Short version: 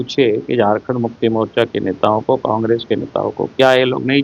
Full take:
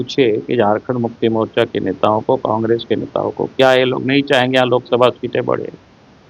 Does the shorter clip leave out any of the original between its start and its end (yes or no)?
no